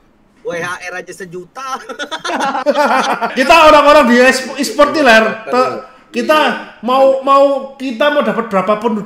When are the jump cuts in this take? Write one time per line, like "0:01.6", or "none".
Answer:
0:03.3